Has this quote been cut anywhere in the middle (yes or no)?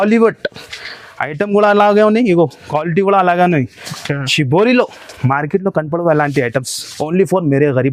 no